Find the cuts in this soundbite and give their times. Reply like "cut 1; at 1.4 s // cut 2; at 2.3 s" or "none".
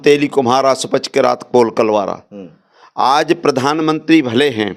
none